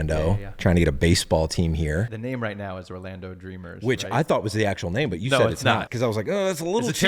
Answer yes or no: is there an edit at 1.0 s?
no